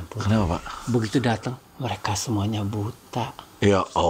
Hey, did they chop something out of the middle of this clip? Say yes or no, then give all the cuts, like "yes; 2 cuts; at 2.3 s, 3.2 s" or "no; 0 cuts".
no; 0 cuts